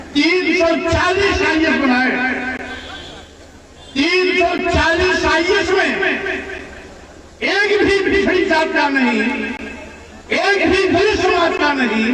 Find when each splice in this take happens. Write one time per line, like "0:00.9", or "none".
none